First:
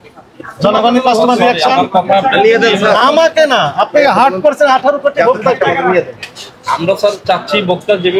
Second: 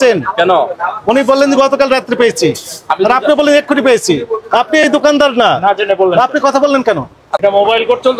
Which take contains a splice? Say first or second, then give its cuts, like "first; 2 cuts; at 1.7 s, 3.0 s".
second; 1 cut; at 7.2 s